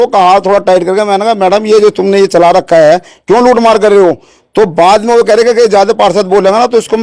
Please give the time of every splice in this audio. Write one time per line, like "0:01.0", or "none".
none